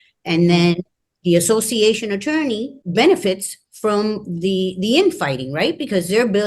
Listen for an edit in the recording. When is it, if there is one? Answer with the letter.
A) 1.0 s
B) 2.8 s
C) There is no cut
B